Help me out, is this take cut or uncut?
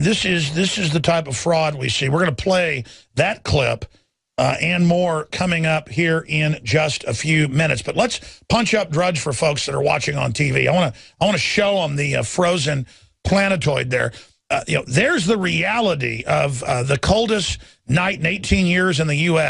cut